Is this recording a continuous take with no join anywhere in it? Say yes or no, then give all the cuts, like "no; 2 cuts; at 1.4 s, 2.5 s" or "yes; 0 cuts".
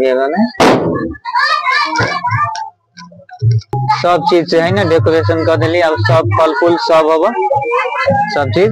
no; 1 cut; at 3.8 s